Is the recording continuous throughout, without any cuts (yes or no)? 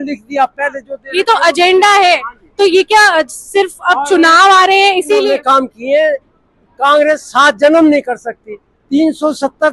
no